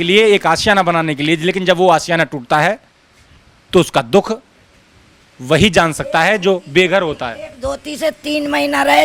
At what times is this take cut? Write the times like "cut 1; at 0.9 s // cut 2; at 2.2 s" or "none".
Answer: none